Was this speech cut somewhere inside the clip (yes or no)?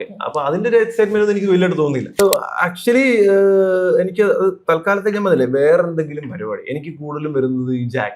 yes